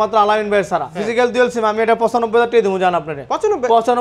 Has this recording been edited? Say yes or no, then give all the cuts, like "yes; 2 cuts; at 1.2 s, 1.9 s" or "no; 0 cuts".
yes; 1 cut; at 0.9 s